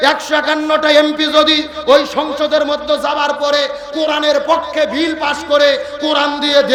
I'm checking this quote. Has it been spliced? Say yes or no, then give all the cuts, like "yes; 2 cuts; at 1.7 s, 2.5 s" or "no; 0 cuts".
no; 0 cuts